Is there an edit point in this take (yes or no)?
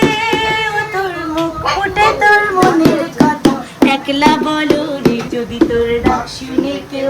yes